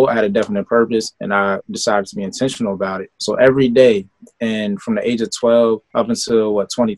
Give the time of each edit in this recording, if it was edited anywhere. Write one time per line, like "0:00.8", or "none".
0:03.1
0:05.9